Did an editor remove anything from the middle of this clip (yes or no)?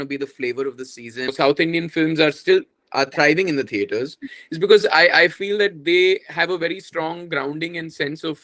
yes